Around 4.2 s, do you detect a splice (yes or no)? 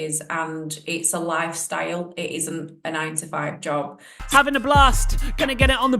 yes